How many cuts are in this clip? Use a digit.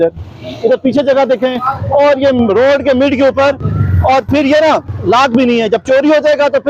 0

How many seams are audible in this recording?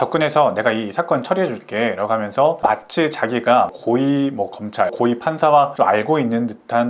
0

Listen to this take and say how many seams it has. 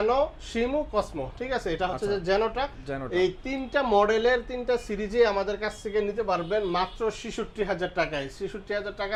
0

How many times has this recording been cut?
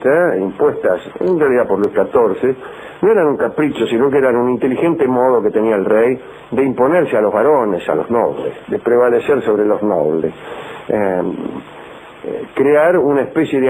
1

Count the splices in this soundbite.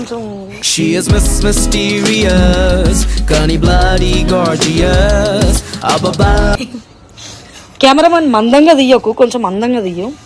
0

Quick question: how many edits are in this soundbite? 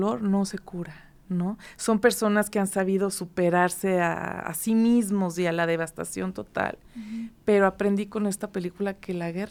0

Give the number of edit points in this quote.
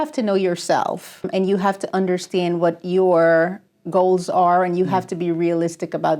1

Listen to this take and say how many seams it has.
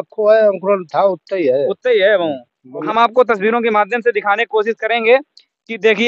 1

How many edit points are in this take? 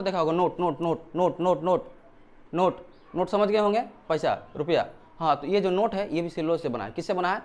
0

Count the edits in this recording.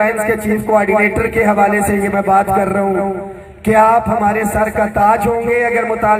0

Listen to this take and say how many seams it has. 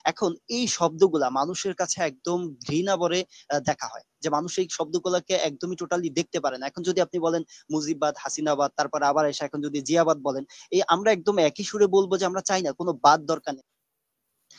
1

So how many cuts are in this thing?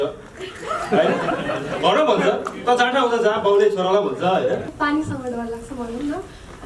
1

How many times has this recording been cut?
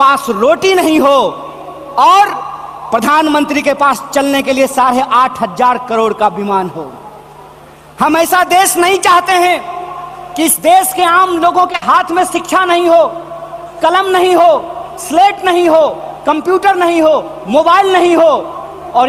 0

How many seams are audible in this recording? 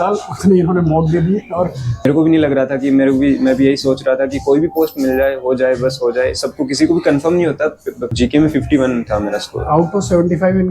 2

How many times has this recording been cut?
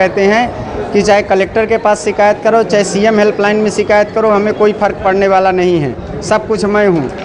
0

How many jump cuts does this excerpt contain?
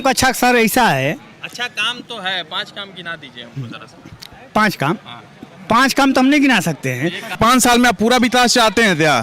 1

